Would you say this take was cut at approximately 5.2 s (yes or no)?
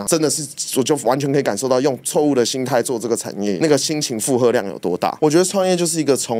yes